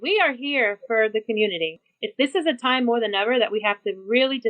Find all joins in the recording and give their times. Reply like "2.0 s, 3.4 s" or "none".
1.8 s

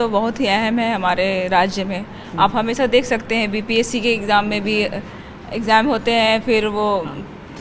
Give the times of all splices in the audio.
none

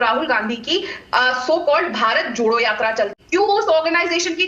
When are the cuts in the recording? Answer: 3.2 s

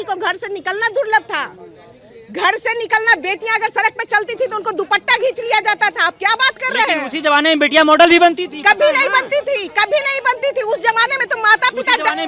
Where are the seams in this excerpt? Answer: none

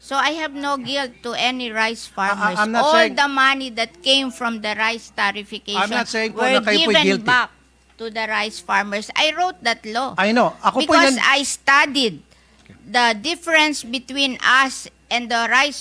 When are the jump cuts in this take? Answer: none

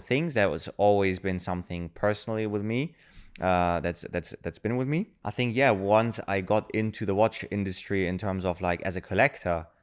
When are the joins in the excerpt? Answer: 5.2 s

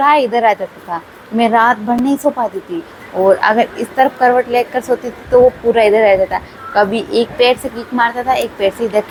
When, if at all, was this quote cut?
none

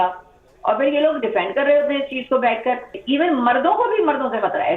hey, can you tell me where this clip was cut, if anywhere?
2.9 s

